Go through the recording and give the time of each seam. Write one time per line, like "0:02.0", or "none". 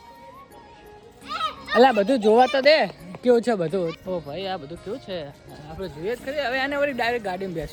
none